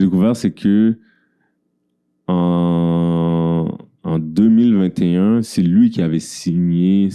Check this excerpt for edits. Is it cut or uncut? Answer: uncut